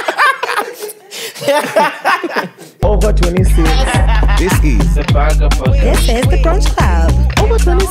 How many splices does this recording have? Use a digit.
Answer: 1